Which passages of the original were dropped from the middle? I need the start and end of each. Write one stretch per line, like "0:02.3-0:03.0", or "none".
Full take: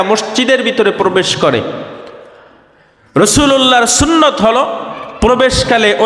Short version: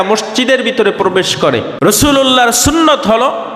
0:01.7-0:03.0